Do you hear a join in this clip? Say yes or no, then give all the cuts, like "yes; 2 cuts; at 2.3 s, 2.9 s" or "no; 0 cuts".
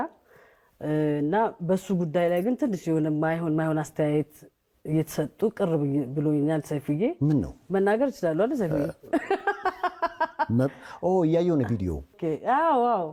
no; 0 cuts